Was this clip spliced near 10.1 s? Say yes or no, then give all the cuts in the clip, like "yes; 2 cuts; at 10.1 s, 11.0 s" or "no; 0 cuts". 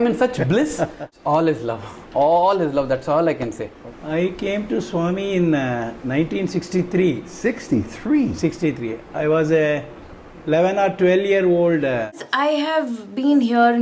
no; 3 cuts; at 1.0 s, 3.7 s, 12.2 s